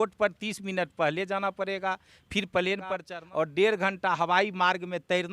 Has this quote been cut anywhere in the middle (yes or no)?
yes